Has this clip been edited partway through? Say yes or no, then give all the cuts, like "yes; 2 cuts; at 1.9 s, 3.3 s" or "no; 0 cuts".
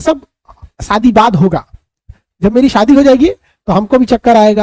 no; 0 cuts